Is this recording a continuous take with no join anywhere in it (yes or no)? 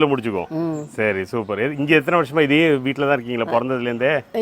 yes